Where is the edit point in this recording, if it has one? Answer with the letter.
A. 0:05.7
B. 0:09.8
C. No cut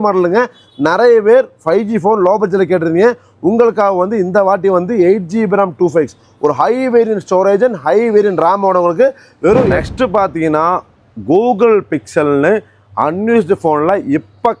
B